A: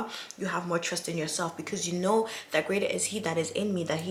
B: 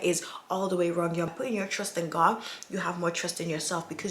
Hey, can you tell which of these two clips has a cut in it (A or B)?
B